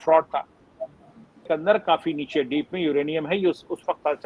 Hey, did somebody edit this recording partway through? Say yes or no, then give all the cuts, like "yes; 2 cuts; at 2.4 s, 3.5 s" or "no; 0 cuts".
yes; 1 cut; at 1.4 s